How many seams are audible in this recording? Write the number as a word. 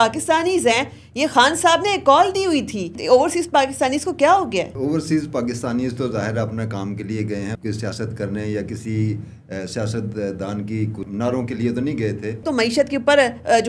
five